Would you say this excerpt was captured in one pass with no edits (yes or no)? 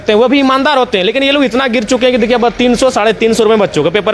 yes